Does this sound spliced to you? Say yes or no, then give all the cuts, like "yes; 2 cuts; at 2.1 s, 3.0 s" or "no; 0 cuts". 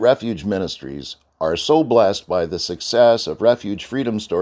no; 0 cuts